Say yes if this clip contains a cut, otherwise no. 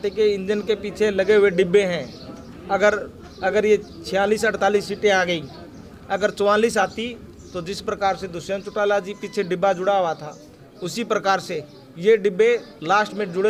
no